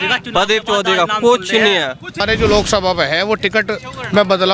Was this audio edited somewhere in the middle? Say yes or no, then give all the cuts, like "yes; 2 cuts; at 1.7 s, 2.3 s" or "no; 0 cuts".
yes; 1 cut; at 2.2 s